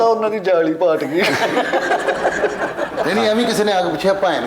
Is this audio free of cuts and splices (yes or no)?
no